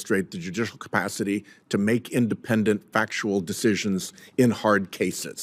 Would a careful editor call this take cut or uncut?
uncut